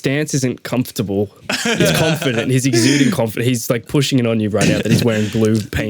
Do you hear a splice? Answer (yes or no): yes